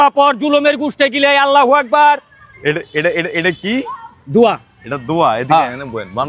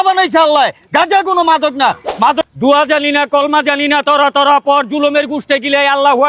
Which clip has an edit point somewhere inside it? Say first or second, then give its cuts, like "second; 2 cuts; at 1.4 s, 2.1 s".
second; 1 cut; at 2.4 s